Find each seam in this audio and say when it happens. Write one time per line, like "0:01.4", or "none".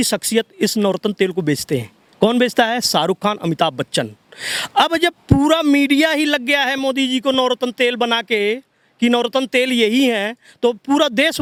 none